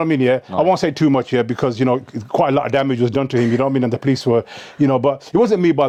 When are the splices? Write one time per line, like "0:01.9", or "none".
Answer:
none